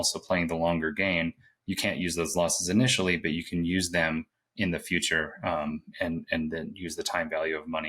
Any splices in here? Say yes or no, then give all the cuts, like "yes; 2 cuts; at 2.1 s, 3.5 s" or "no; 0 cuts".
no; 0 cuts